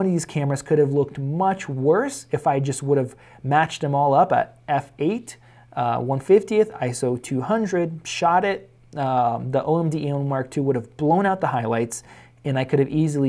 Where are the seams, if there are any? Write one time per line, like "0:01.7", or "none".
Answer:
none